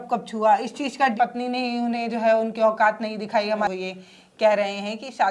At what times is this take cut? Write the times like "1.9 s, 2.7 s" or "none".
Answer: 1.1 s, 3.7 s